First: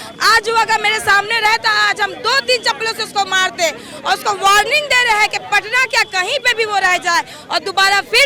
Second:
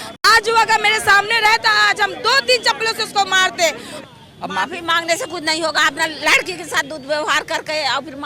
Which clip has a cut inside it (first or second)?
second